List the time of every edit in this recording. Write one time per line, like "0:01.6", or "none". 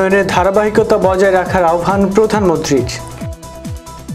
0:02.9

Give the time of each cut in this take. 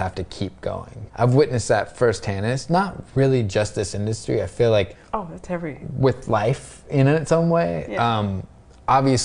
0:00.9
0:05.0

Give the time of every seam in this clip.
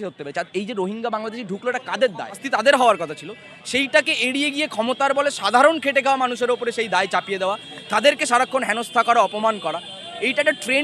0:02.4

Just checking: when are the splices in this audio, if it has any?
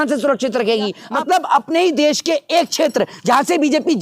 0:01.0

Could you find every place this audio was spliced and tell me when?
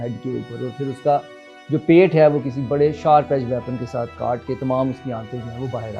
none

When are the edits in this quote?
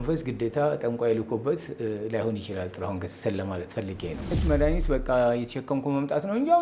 0:04.3

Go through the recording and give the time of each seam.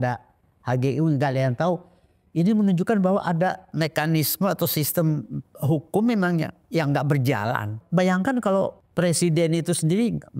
0:03.7
0:07.8
0:08.8

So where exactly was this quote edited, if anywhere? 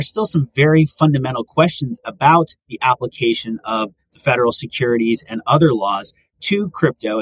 none

